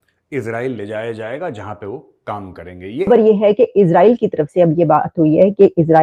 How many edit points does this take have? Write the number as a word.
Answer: one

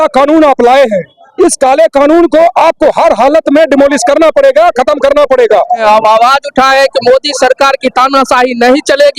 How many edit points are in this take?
one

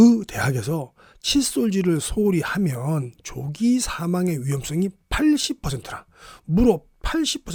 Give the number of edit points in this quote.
zero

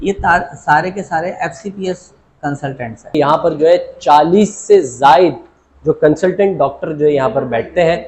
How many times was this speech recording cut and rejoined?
one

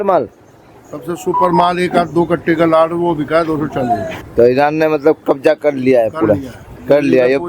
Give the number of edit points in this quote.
one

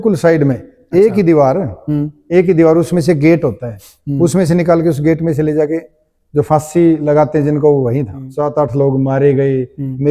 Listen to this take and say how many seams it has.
one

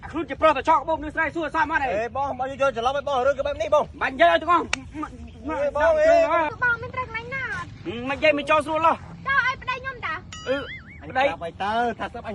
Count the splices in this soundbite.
one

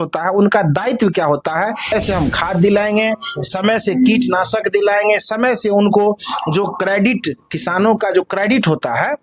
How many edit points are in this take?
one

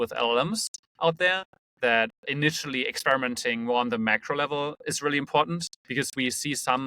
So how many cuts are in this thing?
one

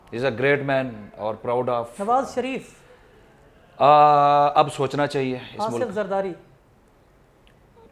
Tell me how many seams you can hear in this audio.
zero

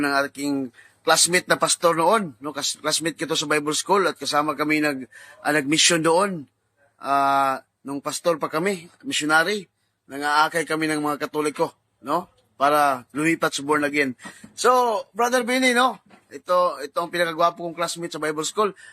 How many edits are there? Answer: one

